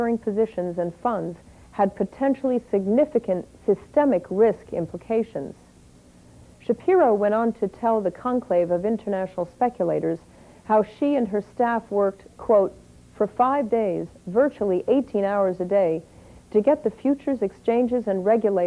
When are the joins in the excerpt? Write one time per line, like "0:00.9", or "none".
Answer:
0:00.9